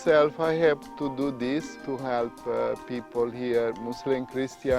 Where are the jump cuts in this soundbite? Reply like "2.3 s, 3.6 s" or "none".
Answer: 1.8 s